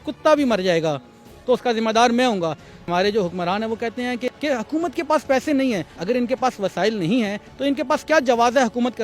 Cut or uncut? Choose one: cut